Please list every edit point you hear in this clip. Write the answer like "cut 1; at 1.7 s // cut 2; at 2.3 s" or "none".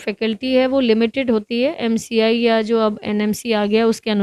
none